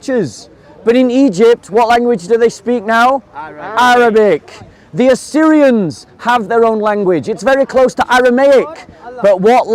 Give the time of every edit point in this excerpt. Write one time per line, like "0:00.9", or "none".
none

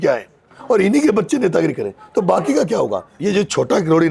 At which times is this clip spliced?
0:03.1

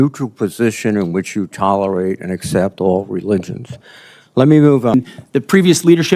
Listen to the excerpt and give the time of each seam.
0:04.9

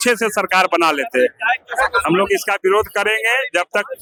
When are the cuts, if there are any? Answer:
none

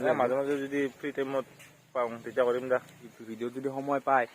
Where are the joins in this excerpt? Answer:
0:03.2

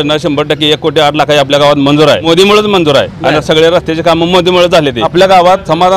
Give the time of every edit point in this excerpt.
0:02.2
0:05.0

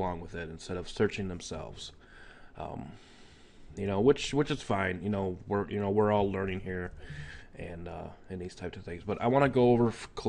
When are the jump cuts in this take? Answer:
0:06.7

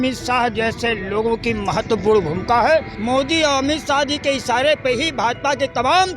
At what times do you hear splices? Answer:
0:02.9

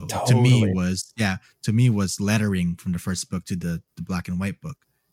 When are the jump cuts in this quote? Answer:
none

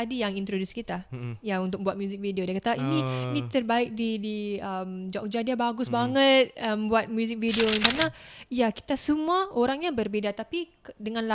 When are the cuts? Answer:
0:07.8

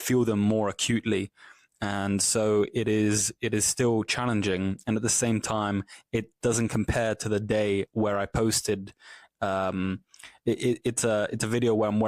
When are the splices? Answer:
none

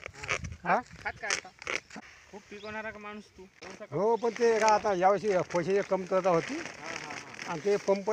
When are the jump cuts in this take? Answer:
0:02.0
0:03.6

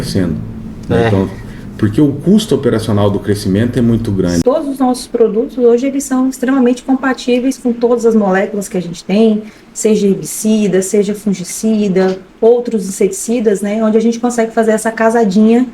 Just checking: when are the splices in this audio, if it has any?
0:04.4

